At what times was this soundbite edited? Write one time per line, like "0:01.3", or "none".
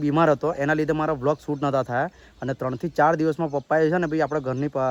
none